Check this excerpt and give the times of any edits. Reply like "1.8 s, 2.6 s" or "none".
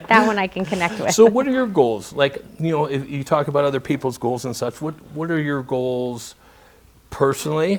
none